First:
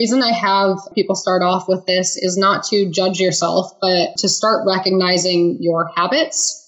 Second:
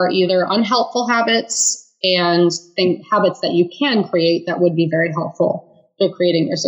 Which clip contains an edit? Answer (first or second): first